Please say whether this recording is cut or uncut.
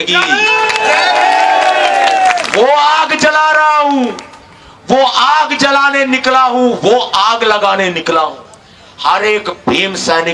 uncut